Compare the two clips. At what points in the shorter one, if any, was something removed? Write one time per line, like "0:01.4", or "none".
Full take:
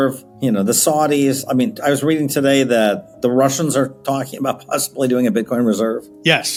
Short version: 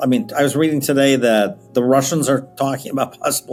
none